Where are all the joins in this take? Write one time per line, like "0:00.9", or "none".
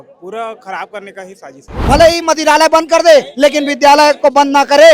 0:01.7